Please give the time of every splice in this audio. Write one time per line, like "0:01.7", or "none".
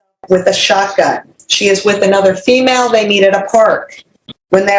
none